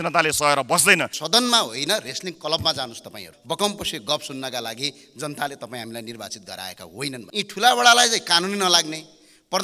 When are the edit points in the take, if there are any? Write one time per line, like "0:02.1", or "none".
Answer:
0:01.2
0:03.3
0:07.2